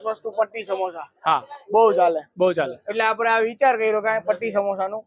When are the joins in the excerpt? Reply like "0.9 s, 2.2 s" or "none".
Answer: none